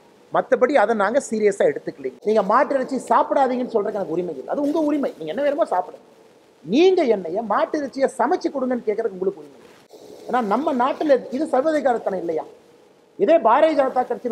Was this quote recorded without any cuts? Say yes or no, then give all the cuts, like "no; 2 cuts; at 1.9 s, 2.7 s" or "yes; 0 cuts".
no; 1 cut; at 2.1 s